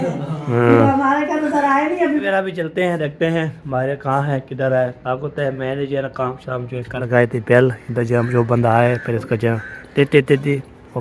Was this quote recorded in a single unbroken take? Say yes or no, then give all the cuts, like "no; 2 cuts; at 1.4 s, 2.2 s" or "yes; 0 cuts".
no; 2 cuts; at 2.2 s, 7.0 s